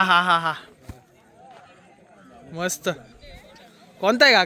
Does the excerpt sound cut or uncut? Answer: uncut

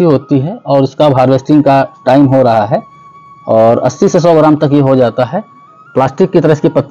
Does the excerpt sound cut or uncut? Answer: uncut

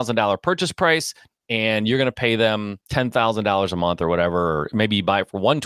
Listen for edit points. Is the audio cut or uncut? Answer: cut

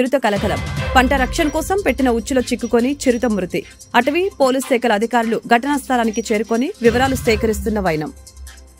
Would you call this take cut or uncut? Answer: uncut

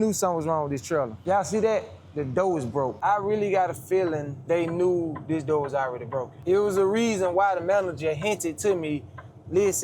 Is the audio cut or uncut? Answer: cut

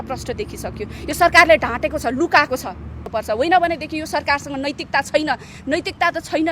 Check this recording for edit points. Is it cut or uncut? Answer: cut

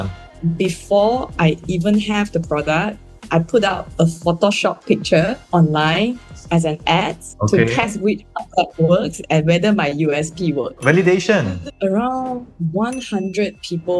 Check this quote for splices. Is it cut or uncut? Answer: cut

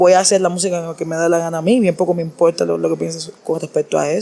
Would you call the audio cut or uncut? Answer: cut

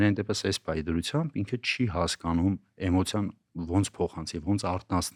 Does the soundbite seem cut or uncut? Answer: uncut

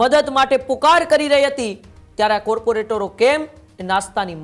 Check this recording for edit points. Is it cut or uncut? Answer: uncut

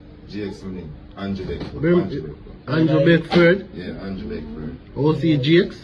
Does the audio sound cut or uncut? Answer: uncut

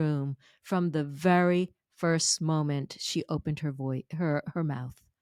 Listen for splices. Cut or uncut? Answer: uncut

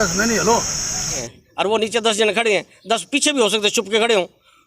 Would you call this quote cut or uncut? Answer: cut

